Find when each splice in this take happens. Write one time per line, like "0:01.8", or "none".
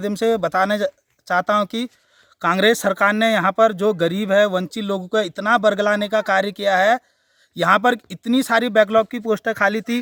none